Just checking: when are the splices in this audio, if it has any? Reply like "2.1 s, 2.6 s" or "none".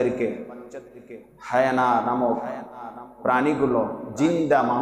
none

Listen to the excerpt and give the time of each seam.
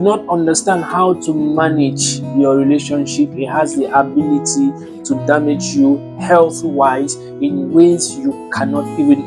none

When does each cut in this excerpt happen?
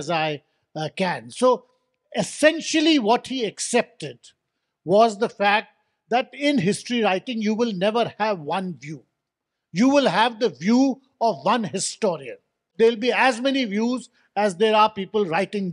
12.7 s

